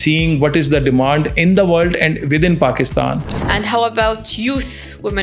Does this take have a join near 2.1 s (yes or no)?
no